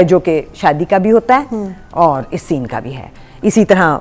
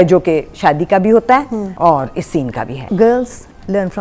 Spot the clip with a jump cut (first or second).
second